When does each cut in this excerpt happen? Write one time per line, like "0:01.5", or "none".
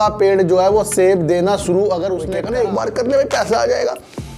0:02.4